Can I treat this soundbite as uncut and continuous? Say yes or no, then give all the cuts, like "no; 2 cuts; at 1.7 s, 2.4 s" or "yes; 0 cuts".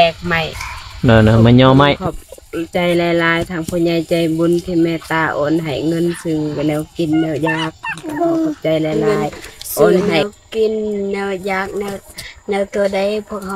no; 2 cuts; at 2.0 s, 10.2 s